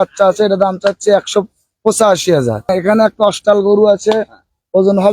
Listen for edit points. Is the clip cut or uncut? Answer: cut